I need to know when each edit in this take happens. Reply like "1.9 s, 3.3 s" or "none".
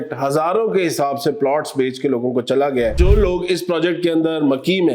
3.0 s